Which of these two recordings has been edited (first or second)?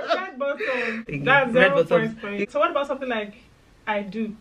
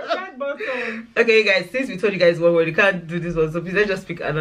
first